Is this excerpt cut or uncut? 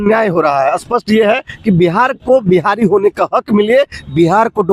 uncut